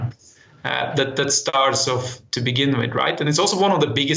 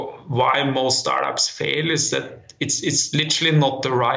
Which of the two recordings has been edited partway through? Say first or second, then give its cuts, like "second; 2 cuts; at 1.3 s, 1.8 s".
first; 1 cut; at 1.5 s